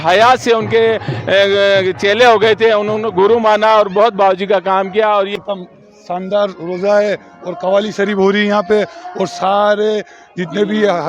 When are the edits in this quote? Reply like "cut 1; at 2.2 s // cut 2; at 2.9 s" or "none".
cut 1; at 5.3 s